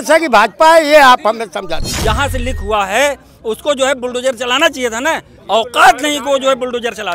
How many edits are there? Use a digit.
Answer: 1